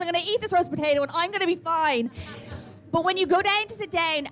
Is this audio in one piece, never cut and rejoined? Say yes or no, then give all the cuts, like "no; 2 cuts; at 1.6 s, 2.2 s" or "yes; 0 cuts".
yes; 0 cuts